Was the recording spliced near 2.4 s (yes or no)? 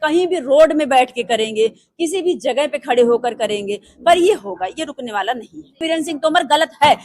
no